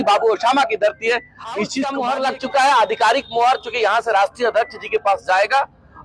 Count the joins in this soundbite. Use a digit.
1